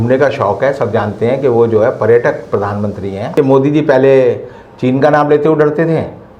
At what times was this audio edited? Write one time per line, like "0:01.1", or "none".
0:03.3